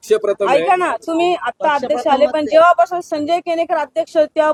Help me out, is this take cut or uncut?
uncut